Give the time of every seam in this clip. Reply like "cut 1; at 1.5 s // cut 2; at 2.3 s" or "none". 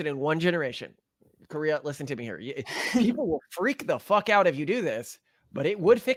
none